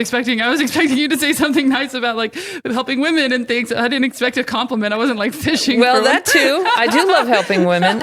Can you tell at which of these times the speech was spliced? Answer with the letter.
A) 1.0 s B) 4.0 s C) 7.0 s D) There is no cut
D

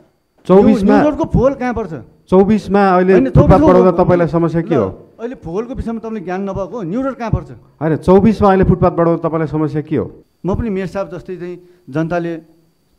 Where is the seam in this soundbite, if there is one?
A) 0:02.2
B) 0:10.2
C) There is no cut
B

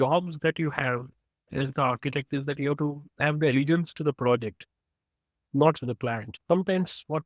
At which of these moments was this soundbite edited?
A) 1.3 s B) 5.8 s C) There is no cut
B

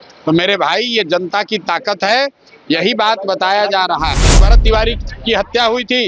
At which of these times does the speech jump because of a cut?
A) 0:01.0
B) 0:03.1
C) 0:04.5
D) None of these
C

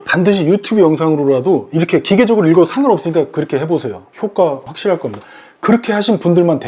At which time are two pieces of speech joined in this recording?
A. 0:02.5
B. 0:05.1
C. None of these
C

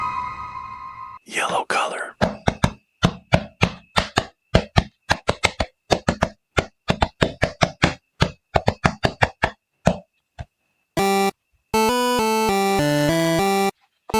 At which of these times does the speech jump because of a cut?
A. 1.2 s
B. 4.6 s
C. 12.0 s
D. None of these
A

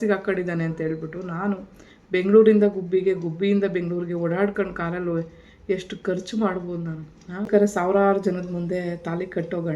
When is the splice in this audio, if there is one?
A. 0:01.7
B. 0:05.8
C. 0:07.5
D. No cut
C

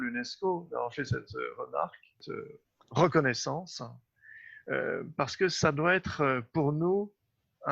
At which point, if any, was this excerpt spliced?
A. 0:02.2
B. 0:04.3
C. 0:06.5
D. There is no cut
A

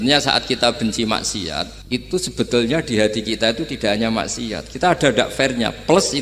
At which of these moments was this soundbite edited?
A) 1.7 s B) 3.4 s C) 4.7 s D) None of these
A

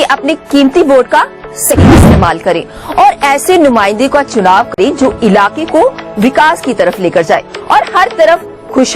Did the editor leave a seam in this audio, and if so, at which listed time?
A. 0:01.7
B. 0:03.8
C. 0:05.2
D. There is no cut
A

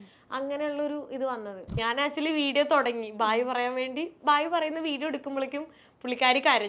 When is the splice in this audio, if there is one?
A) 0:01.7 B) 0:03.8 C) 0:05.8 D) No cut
A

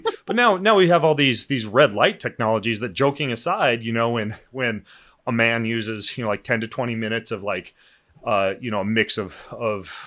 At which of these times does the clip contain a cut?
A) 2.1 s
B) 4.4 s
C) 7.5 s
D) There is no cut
D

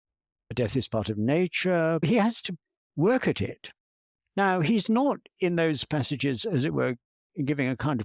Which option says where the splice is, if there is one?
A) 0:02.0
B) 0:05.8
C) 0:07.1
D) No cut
A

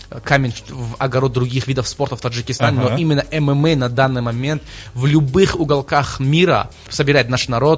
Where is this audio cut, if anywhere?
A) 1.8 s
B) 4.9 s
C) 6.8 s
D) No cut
C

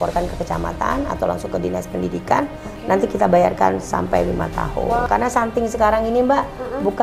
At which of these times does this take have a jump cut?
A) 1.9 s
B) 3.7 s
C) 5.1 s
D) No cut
C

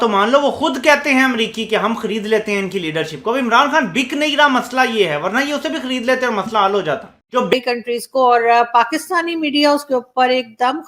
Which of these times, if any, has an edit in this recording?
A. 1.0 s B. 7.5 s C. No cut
B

